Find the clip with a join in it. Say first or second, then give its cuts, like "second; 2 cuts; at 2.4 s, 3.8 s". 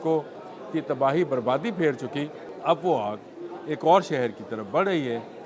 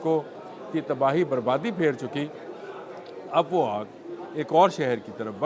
first; 1 cut; at 2.4 s